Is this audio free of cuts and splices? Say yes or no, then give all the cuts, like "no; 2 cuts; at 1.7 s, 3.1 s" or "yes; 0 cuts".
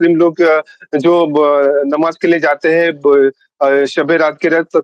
yes; 0 cuts